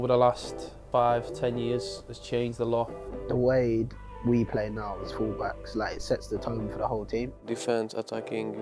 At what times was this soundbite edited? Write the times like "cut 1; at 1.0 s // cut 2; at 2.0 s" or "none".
cut 1; at 0.8 s // cut 2; at 3.1 s // cut 3; at 7.5 s